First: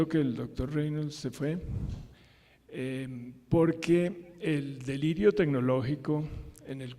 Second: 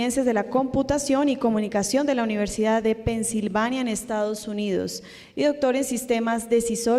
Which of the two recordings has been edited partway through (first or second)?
first